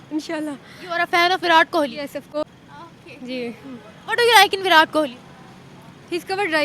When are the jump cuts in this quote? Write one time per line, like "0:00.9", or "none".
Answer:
0:02.4